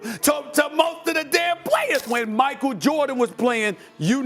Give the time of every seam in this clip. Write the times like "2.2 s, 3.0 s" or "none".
2.1 s